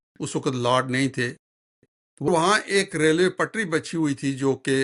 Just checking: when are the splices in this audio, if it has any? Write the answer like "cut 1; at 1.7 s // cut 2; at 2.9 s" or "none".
cut 1; at 2.3 s